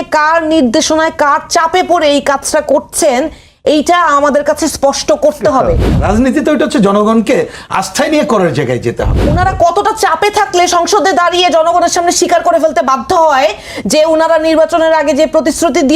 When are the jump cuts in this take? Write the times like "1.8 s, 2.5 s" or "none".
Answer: 5.9 s, 9.2 s